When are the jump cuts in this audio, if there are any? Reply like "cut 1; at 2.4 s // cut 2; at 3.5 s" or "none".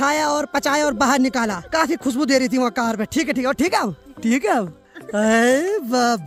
none